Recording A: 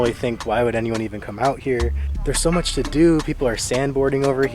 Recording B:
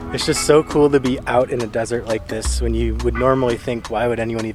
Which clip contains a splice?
A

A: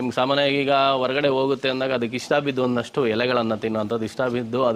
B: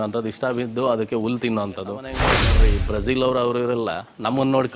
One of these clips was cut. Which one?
B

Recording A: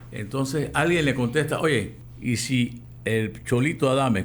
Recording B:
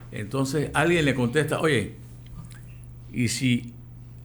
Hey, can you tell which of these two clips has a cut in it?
A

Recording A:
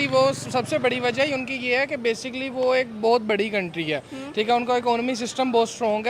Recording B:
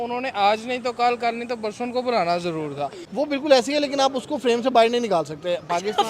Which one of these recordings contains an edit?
B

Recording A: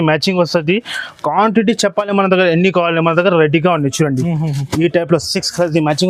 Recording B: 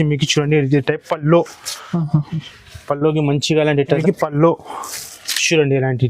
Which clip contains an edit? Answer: B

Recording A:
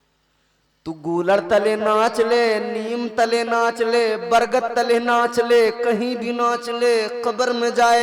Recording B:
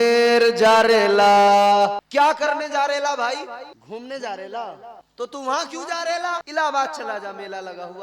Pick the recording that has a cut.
B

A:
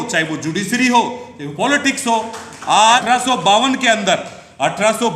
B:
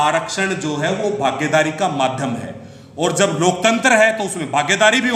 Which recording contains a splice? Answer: A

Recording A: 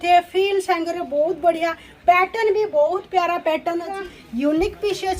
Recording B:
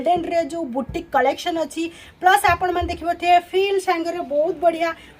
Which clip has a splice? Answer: A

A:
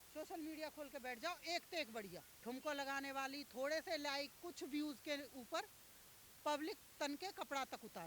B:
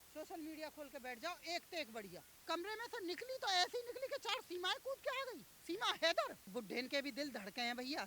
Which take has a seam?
B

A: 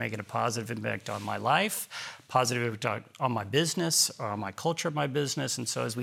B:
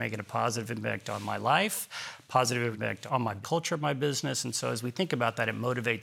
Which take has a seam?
B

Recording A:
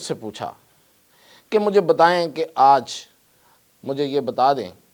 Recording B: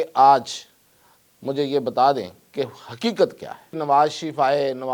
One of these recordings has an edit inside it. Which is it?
B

